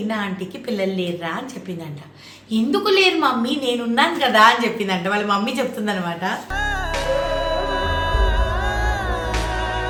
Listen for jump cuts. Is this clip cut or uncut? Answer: uncut